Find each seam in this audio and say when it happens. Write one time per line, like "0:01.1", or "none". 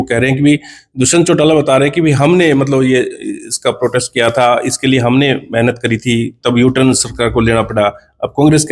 none